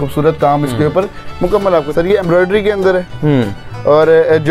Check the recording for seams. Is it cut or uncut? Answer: cut